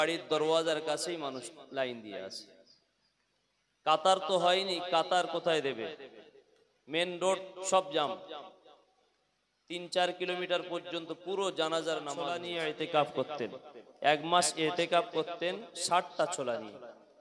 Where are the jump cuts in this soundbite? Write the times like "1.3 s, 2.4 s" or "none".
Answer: 12.5 s